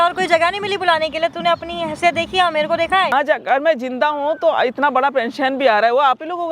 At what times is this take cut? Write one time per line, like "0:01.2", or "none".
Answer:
0:03.1